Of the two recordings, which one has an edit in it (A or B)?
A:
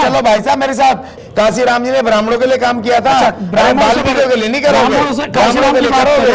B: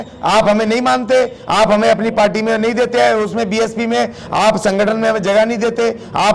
A